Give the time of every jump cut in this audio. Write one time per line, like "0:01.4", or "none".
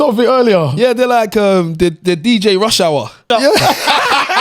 0:03.2